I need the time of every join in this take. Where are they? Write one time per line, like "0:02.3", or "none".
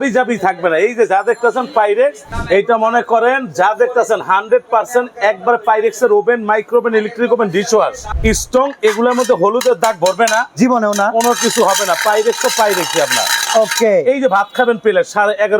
0:02.3
0:08.1